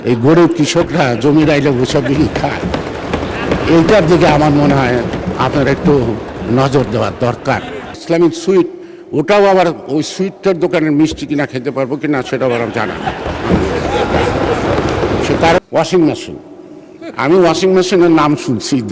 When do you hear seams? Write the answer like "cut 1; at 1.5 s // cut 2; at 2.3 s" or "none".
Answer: cut 1; at 8.0 s // cut 2; at 15.6 s